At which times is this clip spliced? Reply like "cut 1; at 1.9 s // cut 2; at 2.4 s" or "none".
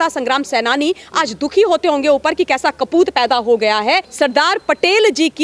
cut 1; at 4.1 s